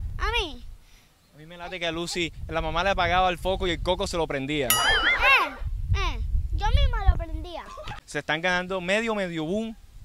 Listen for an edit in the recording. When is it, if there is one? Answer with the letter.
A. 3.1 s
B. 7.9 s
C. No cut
B